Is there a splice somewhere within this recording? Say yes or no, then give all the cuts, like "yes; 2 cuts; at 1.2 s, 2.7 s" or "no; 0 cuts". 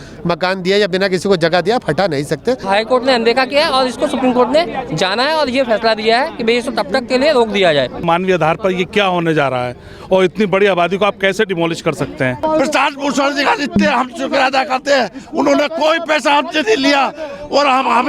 yes; 3 cuts; at 2.6 s, 8.0 s, 12.4 s